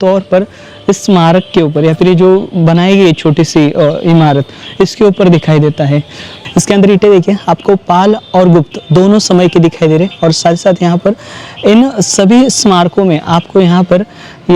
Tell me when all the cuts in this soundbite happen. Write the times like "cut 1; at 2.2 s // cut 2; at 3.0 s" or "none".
cut 1; at 6.4 s